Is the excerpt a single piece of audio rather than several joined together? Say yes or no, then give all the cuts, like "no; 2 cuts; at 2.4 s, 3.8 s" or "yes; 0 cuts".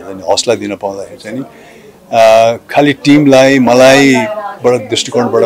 yes; 0 cuts